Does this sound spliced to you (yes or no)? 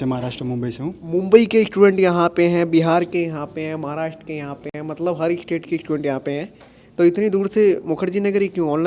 no